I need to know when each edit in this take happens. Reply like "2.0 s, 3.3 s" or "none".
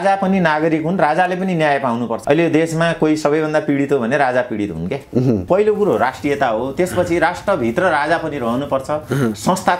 2.2 s, 5.4 s